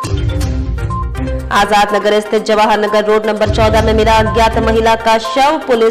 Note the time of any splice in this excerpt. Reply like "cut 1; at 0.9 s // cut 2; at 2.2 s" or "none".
cut 1; at 1.1 s